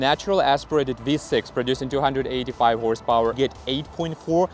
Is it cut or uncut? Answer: cut